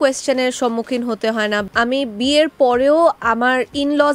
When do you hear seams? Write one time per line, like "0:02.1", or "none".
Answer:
0:01.6